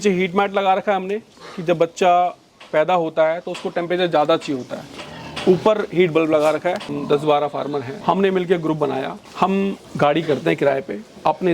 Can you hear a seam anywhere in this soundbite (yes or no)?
yes